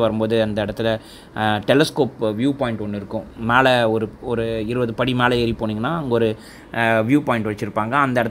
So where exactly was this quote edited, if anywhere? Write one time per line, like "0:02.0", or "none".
none